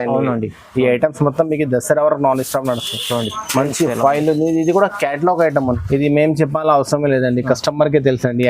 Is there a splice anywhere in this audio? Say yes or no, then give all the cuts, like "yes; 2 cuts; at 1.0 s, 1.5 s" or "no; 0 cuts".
yes; 1 cut; at 5.5 s